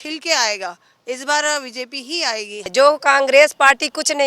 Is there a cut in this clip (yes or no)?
yes